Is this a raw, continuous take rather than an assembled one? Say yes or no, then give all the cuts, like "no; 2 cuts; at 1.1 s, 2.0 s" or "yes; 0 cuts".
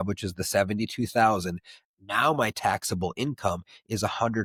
yes; 0 cuts